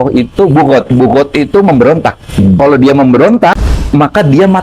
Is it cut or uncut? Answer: cut